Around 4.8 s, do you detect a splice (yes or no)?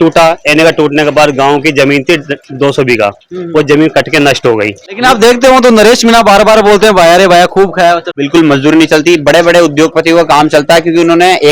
yes